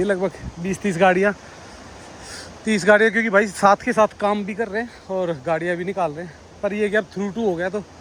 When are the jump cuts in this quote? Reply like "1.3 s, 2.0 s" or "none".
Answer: none